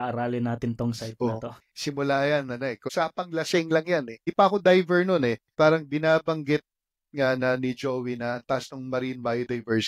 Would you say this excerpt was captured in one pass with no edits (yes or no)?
no